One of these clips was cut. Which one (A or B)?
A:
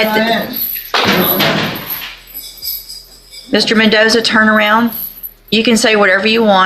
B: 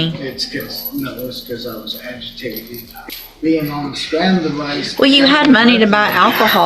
B